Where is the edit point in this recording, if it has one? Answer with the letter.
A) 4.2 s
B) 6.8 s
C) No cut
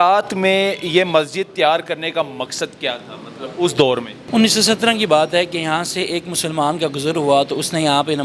A